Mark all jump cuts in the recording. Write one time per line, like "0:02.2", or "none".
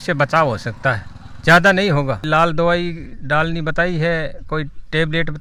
none